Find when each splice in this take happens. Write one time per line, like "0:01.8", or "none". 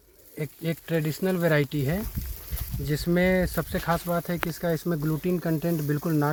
none